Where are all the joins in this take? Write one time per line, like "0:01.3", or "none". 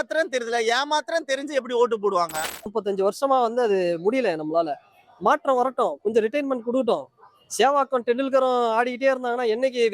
0:02.7